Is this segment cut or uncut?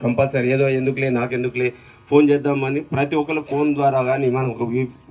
uncut